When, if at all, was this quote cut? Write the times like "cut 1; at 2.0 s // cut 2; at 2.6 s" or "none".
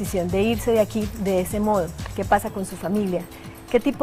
cut 1; at 2.8 s